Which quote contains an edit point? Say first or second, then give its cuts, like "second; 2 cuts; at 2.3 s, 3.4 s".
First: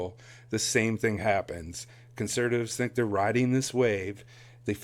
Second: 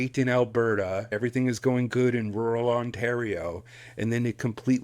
second; 1 cut; at 1.1 s